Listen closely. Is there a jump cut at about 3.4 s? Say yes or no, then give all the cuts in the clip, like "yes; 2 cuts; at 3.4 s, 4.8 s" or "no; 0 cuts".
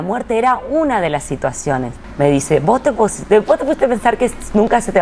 no; 1 cut; at 2.0 s